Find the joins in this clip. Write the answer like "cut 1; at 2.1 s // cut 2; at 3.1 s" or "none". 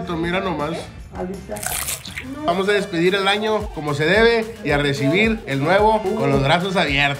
cut 1; at 2.5 s // cut 2; at 3.8 s // cut 3; at 5.5 s // cut 4; at 6.0 s